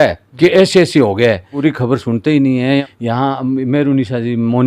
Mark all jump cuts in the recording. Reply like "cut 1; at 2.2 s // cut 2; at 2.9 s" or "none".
cut 1; at 1.5 s // cut 2; at 2.8 s